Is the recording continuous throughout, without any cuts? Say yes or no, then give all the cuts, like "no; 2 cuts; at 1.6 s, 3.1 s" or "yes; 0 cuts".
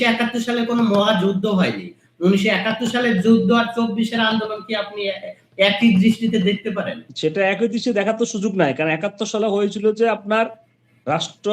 no; 1 cut; at 7.0 s